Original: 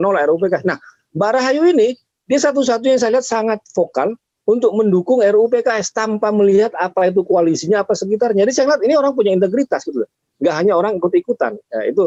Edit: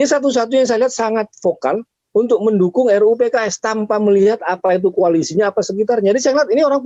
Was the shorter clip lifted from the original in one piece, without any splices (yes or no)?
yes